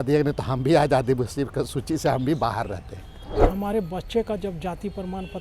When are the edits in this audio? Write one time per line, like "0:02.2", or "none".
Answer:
0:03.5